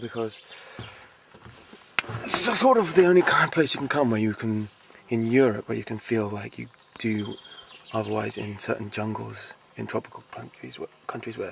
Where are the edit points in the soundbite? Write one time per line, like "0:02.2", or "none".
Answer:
0:01.0